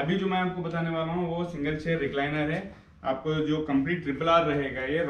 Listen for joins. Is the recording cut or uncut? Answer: uncut